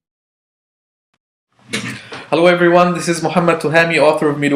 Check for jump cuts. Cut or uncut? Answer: uncut